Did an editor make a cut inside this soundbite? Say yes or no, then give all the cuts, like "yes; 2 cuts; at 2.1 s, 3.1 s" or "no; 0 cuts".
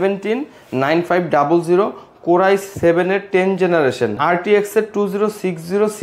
yes; 1 cut; at 4.2 s